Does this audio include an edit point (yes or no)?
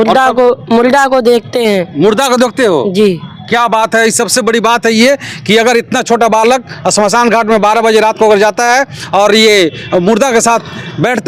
no